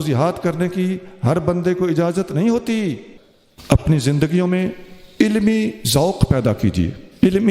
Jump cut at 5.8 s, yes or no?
no